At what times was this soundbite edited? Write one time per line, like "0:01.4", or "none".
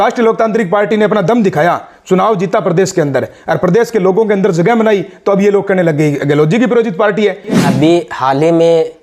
0:07.6